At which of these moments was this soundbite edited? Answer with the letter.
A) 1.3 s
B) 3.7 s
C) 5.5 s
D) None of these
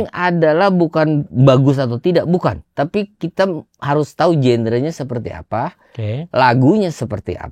A